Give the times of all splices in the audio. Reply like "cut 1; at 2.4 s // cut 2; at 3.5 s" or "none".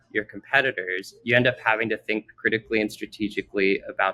cut 1; at 1.1 s // cut 2; at 2.3 s